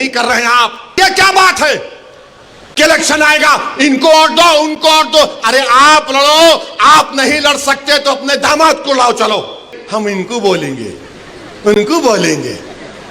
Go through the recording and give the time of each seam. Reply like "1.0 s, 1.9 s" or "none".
1.0 s, 9.8 s